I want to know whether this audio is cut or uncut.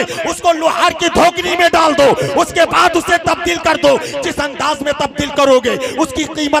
uncut